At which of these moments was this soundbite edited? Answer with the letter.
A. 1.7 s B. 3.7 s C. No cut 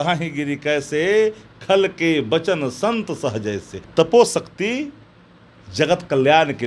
B